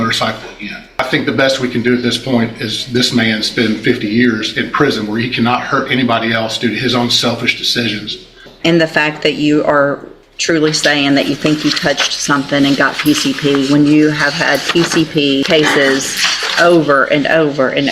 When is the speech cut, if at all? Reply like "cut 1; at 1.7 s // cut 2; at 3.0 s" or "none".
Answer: cut 1; at 0.9 s // cut 2; at 8.5 s // cut 3; at 15.4 s